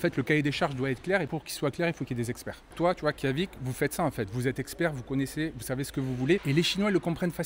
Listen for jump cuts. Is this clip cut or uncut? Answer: cut